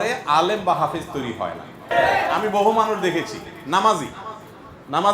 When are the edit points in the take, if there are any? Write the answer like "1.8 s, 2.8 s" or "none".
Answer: 1.9 s

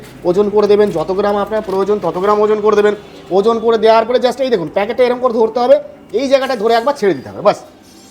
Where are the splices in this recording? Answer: none

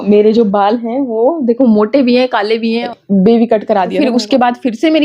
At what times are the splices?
2.9 s, 4.0 s

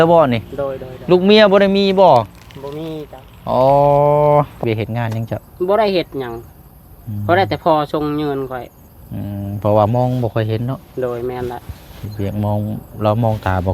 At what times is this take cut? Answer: 4.5 s

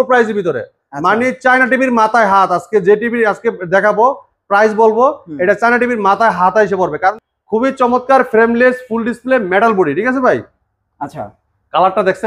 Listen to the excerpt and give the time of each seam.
7.2 s

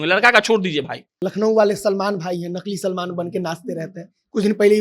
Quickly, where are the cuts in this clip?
1.2 s

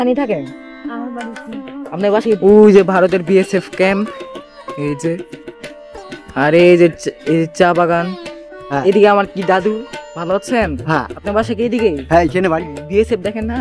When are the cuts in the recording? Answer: 2.4 s, 8.6 s

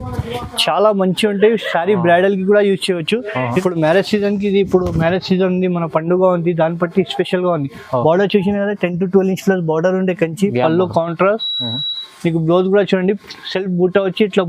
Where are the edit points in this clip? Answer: 3.6 s

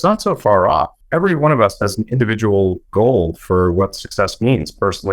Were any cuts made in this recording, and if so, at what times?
1.0 s

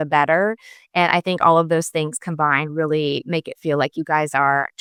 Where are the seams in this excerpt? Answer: none

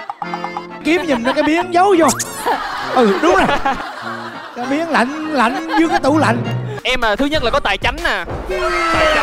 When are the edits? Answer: 6.7 s

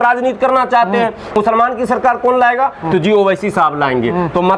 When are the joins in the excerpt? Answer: 1.3 s

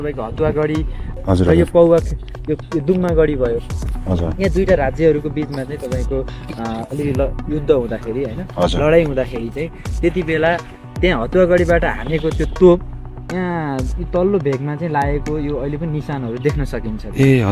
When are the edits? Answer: 1.1 s

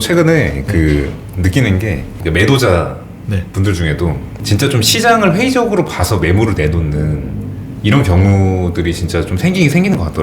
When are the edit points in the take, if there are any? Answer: 2.1 s, 4.3 s

